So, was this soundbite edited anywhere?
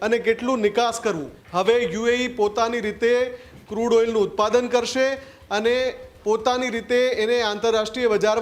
yes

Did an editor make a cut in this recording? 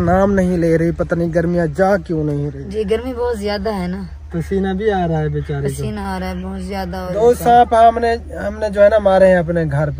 yes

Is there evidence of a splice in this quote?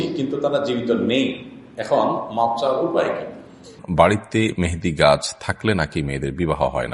yes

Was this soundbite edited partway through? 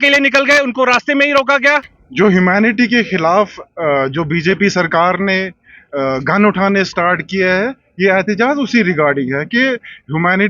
yes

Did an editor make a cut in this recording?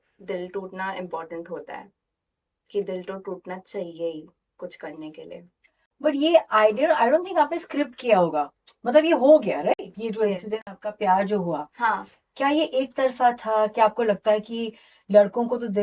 no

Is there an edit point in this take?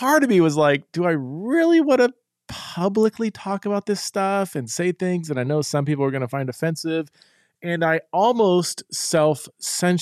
no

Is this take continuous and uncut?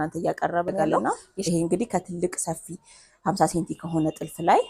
no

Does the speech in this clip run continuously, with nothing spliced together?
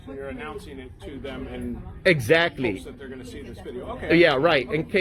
yes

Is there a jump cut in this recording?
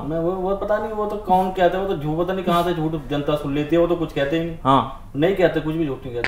no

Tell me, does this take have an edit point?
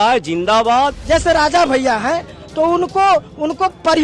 yes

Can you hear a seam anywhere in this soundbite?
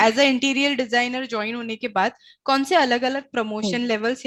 no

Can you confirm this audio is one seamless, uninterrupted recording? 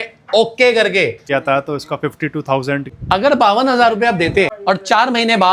no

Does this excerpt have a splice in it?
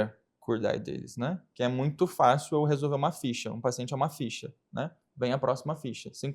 yes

